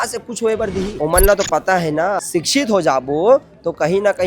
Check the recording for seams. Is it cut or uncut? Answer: cut